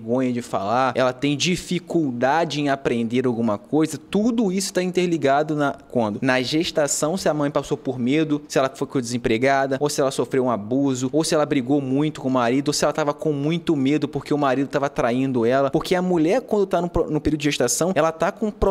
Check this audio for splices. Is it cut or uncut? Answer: cut